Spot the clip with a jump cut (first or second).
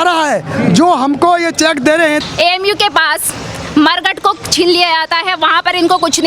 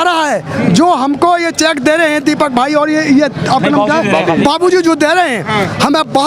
first